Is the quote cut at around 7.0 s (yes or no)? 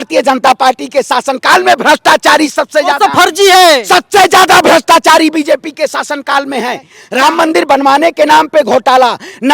yes